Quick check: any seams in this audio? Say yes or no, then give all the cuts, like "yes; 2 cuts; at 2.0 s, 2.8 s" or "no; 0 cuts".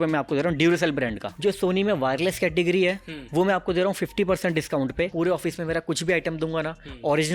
yes; 2 cuts; at 1.3 s, 5.1 s